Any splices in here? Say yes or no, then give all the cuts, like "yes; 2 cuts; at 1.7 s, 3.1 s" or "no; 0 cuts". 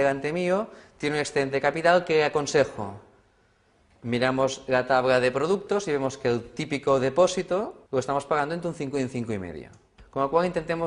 no; 0 cuts